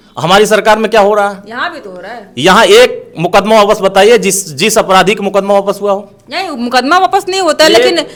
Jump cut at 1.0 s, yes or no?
no